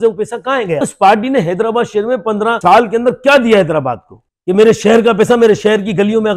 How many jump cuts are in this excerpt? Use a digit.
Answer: 3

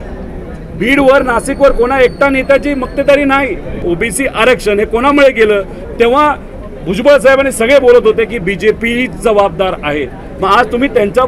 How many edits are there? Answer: 1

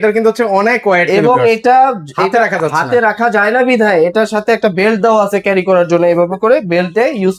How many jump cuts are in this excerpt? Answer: 0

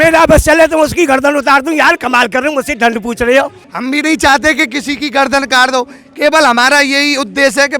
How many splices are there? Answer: 1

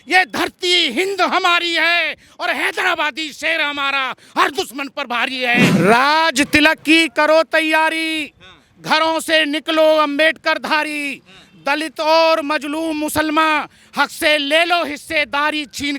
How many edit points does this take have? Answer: 1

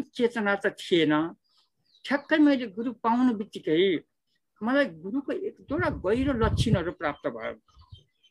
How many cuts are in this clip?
0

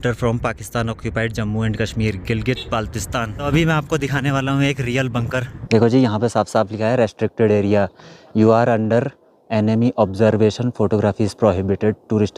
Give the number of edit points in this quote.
2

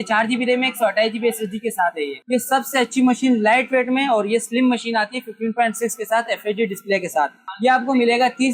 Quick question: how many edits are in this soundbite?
2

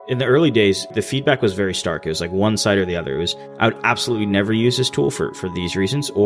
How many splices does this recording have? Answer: 1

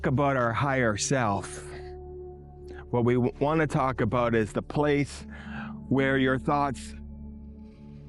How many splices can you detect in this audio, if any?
3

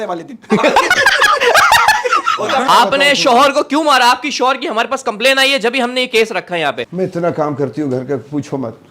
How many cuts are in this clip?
2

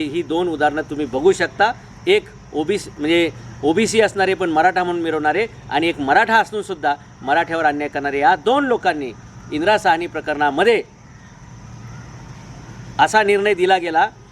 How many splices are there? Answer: 0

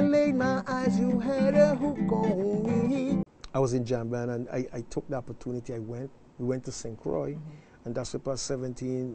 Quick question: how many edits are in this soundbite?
1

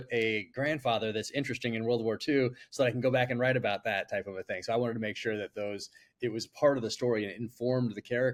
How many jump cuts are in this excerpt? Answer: 0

